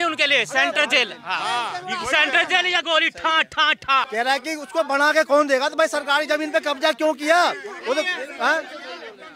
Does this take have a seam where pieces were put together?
yes; 1 cut; at 4.1 s

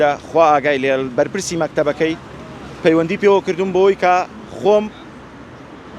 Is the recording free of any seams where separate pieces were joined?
yes; 0 cuts

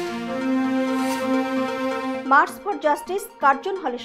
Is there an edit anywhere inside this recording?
yes; 1 cut; at 2.2 s

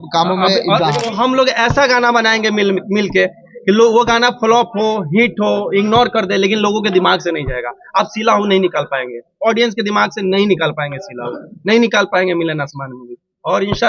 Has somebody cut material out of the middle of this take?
yes; 1 cut; at 1.0 s

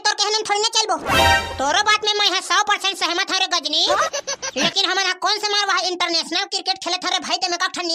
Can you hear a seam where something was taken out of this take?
no; 0 cuts

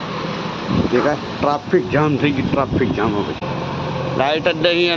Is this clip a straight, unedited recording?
no; 1 cut; at 3.4 s

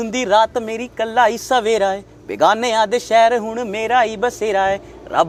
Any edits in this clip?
no; 0 cuts

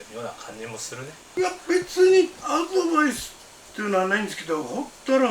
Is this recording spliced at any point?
yes; 1 cut; at 1.2 s

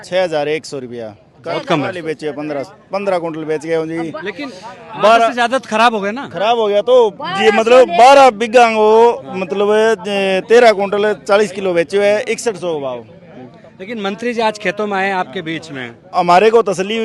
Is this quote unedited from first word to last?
yes; 0 cuts

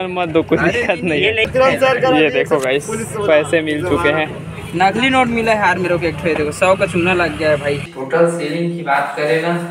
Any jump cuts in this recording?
yes; 2 cuts; at 1.4 s, 7.9 s

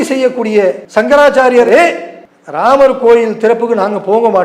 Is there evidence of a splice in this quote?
yes; 2 cuts; at 0.8 s, 1.7 s

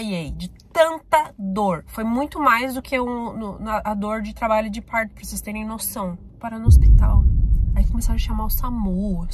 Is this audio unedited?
no; 2 cuts; at 1.9 s, 6.3 s

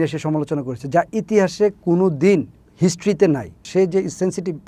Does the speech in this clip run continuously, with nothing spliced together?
no; 1 cut; at 3.6 s

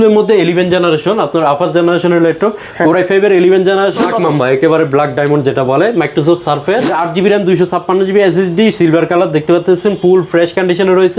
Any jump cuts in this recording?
yes; 2 cuts; at 4.0 s, 6.9 s

